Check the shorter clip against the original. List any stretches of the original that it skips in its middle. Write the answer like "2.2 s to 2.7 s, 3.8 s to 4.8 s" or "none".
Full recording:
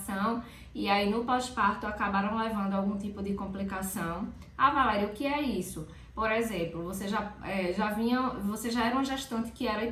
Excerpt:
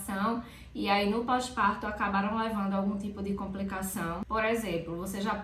4.2 s to 6.1 s

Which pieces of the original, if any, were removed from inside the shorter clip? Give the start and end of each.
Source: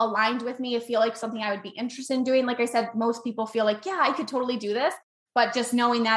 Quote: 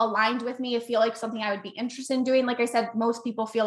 none

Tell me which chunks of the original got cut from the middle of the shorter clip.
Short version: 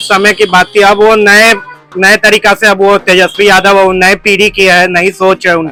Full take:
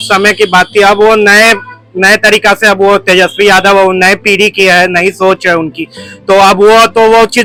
none

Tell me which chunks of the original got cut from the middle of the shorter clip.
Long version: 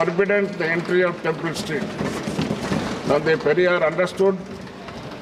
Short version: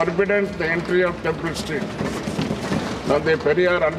none

